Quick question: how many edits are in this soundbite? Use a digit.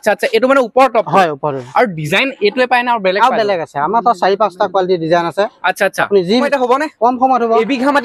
1